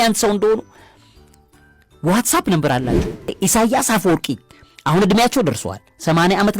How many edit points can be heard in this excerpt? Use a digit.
1